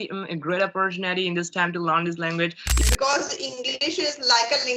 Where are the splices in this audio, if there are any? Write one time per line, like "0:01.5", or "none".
0:02.8